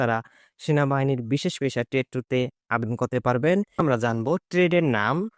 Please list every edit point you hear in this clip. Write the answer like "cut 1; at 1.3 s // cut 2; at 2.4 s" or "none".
cut 1; at 3.8 s

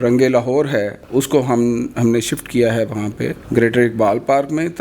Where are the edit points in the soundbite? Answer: cut 1; at 1.0 s // cut 2; at 3.3 s

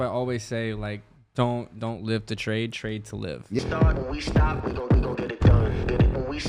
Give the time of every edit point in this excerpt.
cut 1; at 3.6 s

